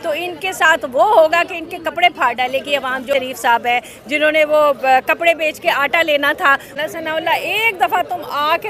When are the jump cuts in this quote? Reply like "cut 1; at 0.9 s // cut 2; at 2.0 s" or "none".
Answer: cut 1; at 3.0 s // cut 2; at 6.7 s

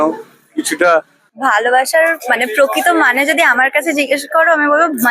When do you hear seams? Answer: cut 1; at 1.3 s

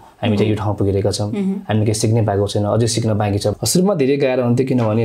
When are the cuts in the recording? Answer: cut 1; at 3.6 s

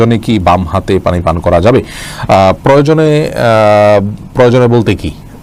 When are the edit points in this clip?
none

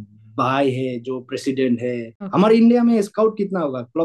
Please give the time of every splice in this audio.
cut 1; at 2.1 s

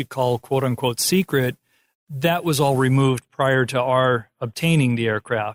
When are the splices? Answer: none

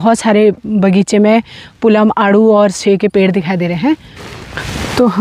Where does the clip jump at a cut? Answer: cut 1; at 4.2 s

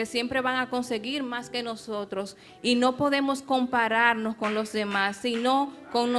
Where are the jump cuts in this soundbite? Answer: none

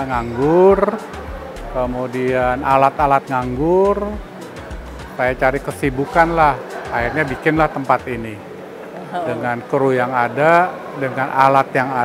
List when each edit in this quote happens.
none

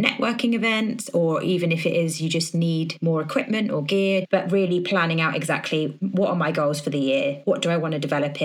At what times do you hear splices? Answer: cut 1; at 2.9 s // cut 2; at 4.2 s // cut 3; at 5.9 s // cut 4; at 7.4 s

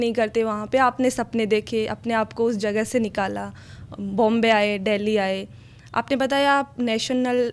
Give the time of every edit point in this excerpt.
none

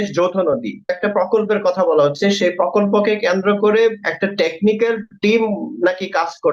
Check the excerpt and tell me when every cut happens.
cut 1; at 1.0 s

